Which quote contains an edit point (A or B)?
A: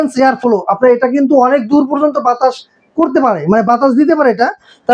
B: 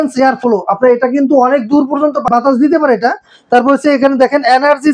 B